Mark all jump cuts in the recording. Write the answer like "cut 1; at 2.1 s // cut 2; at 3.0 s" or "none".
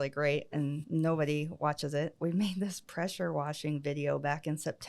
cut 1; at 0.8 s // cut 2; at 2.2 s